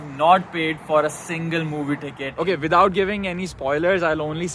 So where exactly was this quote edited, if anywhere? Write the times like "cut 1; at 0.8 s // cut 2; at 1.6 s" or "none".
cut 1; at 2.3 s